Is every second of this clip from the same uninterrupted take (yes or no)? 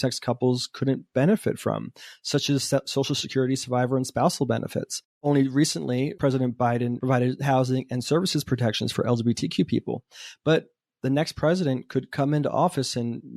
yes